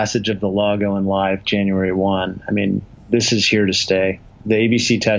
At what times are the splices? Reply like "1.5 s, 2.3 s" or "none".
none